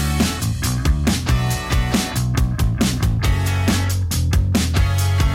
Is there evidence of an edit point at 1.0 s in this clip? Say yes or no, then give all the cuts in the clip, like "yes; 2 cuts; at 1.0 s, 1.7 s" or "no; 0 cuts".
no; 1 cut; at 2.2 s